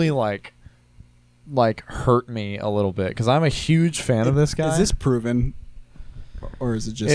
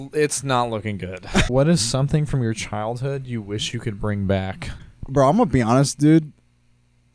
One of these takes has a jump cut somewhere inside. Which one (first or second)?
second